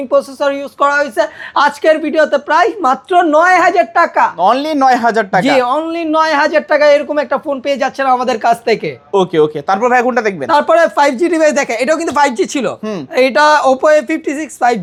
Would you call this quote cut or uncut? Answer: uncut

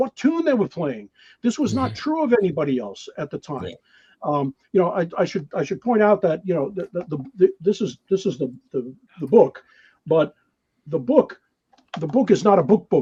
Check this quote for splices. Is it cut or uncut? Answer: uncut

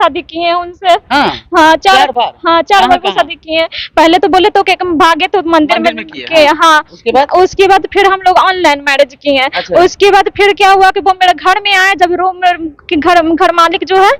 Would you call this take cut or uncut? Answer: uncut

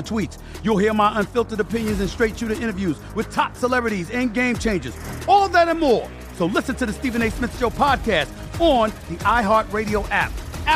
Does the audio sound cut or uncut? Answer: uncut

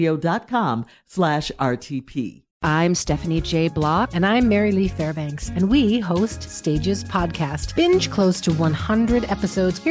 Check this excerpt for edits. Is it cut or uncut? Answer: cut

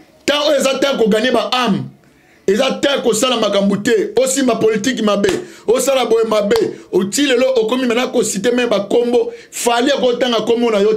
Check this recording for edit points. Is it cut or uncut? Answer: uncut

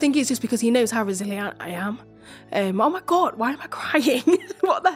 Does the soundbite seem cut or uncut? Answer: uncut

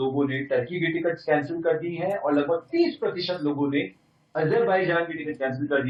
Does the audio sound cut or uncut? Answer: uncut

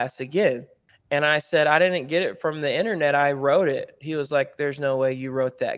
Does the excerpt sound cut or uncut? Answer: uncut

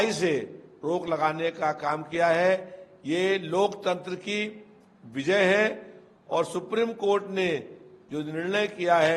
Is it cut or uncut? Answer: uncut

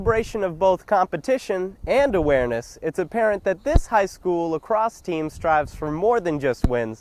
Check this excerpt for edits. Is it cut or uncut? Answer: uncut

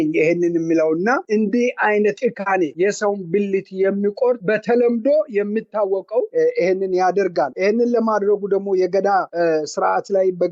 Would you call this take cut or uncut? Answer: uncut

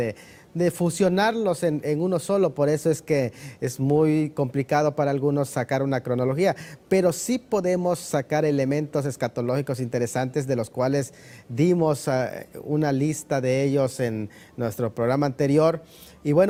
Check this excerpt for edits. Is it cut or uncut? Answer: uncut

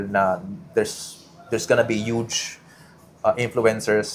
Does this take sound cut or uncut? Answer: uncut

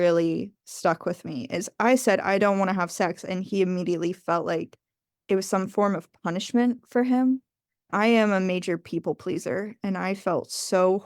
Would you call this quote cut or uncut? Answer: cut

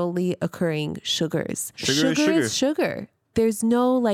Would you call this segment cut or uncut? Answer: cut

